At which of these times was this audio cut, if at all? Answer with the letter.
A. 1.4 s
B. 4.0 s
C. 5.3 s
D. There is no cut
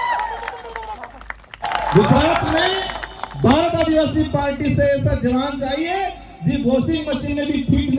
A